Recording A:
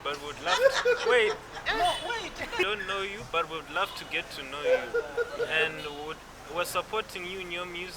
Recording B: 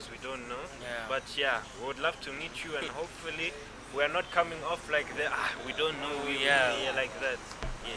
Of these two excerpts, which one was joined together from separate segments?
A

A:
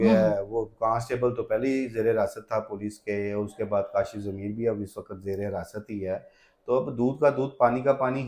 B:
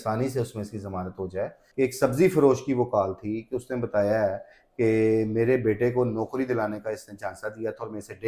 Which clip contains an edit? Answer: B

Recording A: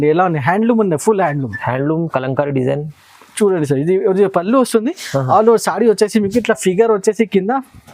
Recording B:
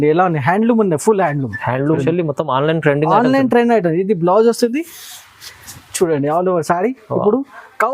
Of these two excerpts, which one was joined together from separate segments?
B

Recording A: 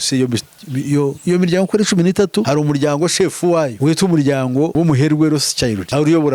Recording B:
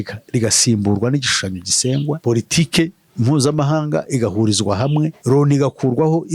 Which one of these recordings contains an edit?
B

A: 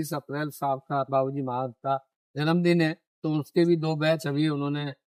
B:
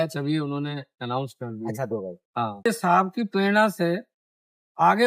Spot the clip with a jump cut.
B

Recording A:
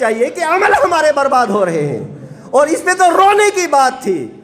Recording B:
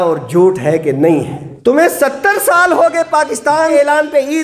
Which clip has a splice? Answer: B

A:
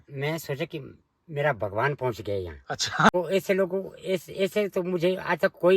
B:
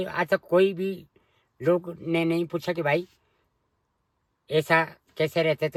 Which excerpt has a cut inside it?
A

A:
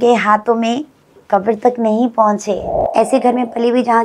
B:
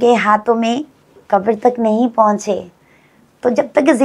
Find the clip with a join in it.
A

